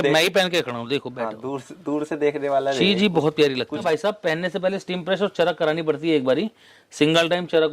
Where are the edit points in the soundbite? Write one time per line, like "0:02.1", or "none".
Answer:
0:03.8

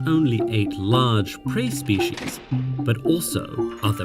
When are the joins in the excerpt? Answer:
none

